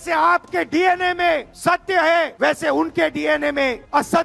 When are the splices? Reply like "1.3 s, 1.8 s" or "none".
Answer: none